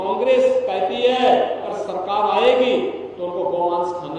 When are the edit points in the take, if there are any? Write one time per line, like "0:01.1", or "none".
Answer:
0:01.7